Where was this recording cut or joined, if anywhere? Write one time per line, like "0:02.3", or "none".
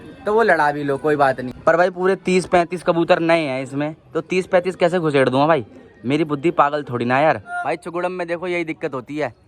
0:01.5
0:07.6